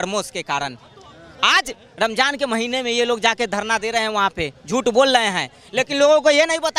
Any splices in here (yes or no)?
no